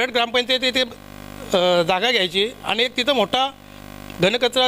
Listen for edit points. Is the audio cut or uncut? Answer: uncut